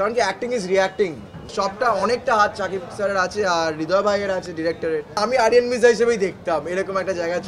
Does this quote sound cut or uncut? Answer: cut